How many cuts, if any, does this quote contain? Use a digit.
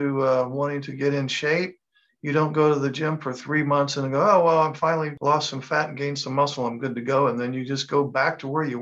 1